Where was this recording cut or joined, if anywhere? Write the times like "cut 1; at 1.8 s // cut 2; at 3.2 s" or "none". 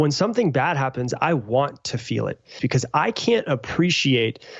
cut 1; at 2.6 s